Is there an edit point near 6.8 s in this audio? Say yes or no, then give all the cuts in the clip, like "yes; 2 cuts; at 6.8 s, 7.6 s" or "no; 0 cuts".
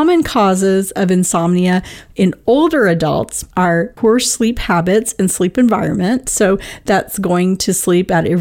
no; 1 cut; at 3.7 s